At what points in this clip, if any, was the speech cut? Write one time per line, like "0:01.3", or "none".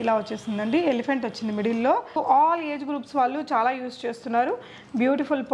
0:02.1